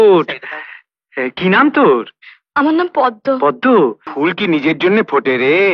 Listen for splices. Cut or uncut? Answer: cut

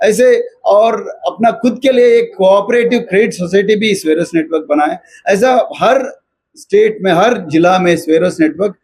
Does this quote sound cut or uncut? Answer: uncut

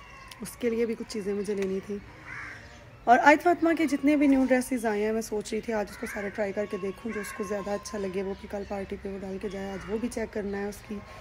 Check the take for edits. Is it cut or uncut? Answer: uncut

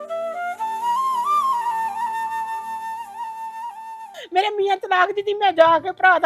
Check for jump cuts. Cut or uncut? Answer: cut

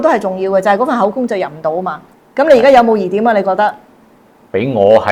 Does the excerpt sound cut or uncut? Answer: cut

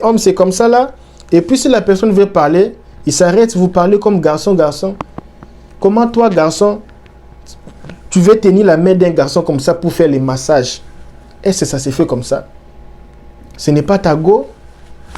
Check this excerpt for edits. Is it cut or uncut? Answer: uncut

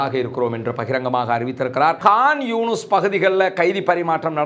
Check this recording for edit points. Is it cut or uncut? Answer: cut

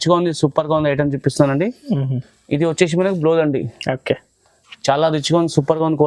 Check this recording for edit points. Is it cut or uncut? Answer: uncut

